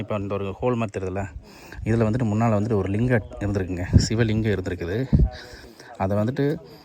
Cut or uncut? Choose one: uncut